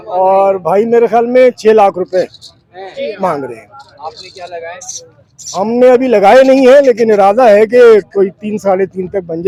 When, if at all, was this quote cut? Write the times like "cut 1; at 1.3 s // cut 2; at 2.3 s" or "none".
none